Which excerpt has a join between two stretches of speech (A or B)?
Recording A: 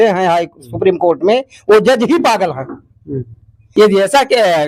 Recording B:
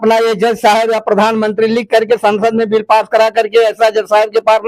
A